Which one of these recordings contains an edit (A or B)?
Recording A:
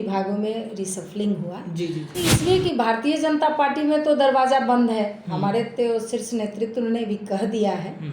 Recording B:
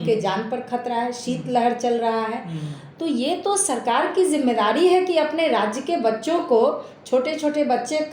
A